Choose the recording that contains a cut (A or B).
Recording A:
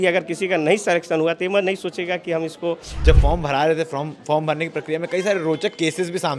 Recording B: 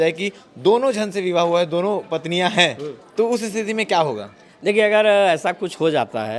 A